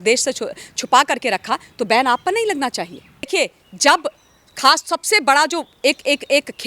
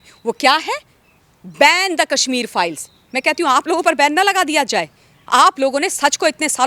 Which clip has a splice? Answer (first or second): first